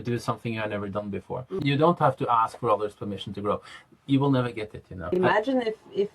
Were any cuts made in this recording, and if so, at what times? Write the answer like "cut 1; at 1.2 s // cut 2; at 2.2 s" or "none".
cut 1; at 1.6 s // cut 2; at 5.0 s